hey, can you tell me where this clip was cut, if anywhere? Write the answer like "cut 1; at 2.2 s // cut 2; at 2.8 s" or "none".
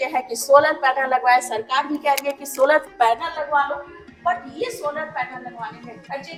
none